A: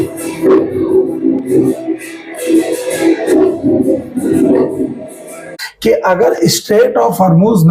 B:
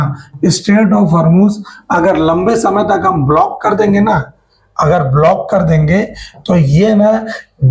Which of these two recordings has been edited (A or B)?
A